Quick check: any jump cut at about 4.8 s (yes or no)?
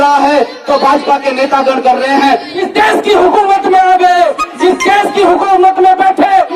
no